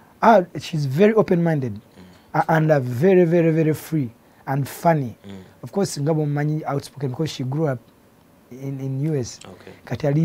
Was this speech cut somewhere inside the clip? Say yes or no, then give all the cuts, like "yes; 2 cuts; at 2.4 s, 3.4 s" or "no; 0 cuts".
no; 0 cuts